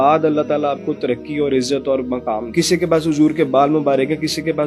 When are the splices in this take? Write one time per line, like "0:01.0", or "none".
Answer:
0:02.4